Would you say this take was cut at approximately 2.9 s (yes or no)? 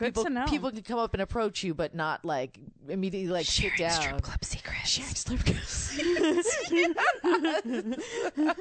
no